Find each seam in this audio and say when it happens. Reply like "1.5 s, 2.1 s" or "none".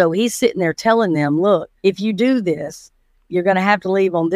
1.7 s